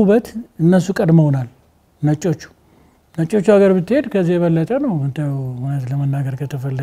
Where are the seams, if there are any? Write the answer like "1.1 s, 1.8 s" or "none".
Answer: none